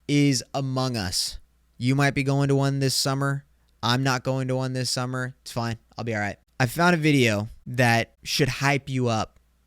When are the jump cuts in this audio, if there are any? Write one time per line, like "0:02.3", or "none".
0:06.4
0:07.6
0:08.2